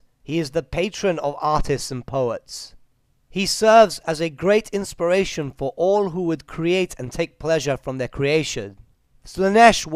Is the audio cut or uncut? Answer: uncut